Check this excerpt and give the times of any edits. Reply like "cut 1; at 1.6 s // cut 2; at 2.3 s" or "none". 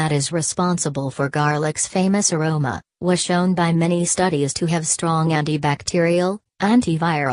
cut 1; at 6.4 s